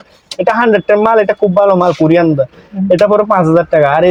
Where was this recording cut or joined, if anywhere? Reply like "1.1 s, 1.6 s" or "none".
none